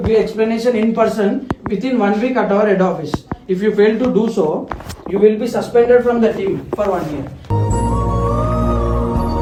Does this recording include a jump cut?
no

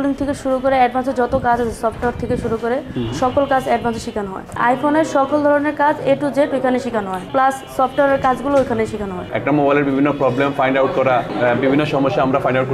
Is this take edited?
yes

